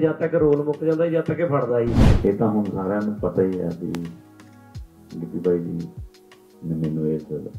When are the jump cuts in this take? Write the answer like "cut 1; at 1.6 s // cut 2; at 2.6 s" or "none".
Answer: cut 1; at 2.1 s